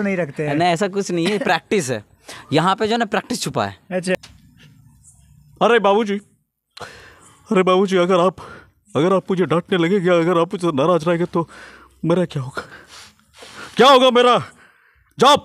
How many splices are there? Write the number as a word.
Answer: one